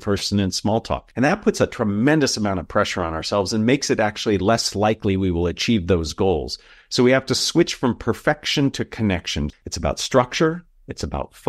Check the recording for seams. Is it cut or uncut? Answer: cut